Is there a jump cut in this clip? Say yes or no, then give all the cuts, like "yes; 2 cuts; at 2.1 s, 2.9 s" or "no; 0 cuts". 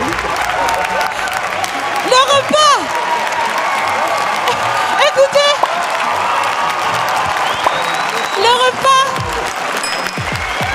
no; 0 cuts